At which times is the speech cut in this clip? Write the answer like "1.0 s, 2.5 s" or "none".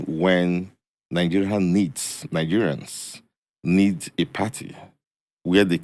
none